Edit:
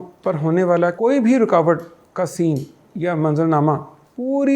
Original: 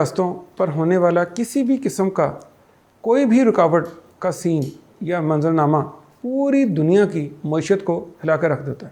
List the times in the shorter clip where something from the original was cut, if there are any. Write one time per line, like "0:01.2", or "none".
0:00.9